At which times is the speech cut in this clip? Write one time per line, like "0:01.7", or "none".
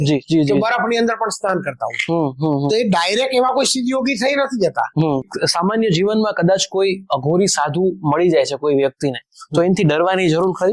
0:05.3